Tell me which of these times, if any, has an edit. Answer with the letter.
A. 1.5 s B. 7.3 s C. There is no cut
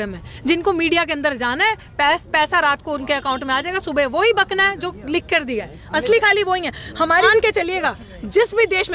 B